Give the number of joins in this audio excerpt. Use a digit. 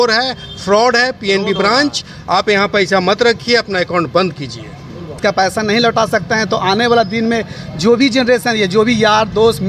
1